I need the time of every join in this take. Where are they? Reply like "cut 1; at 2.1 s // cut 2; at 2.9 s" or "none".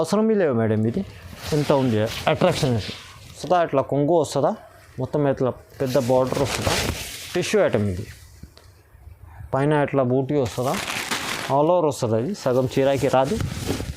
cut 1; at 3.4 s